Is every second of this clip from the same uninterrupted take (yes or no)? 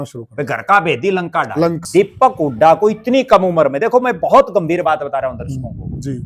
no